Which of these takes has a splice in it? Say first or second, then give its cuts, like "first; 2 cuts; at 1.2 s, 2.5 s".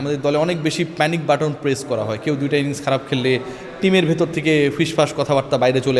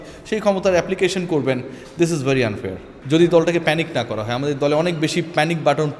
second; 1 cut; at 2.9 s